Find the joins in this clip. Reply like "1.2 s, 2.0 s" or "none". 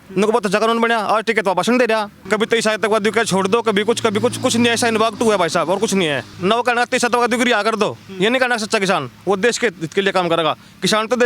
2.2 s, 6.3 s